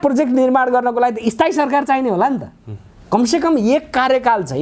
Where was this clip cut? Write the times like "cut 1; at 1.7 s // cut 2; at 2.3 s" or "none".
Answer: none